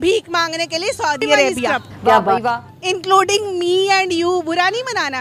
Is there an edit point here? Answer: yes; 1 cut; at 2.4 s

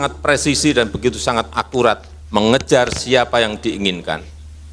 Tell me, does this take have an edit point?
no; 0 cuts

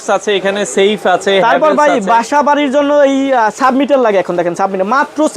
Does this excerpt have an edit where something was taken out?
no; 0 cuts

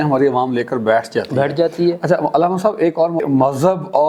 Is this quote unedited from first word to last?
yes; 0 cuts

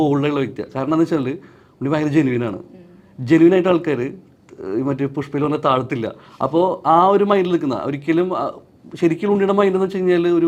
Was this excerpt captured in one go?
yes; 0 cuts

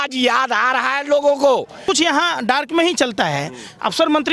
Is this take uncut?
no; 1 cut; at 1.8 s

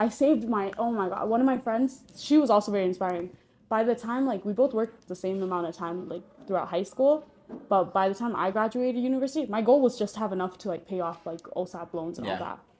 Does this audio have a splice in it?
no; 0 cuts

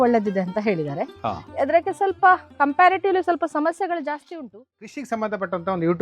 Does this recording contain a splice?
yes; 1 cut; at 4.9 s

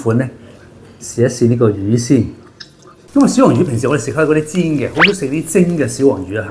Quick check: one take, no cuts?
yes; 0 cuts

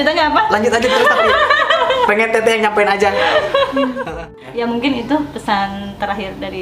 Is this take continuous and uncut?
no; 1 cut; at 4.2 s

